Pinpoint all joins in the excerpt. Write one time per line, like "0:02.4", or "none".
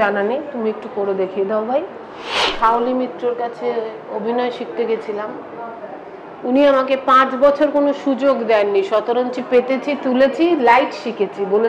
0:02.4